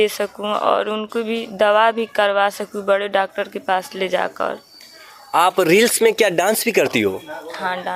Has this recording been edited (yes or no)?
no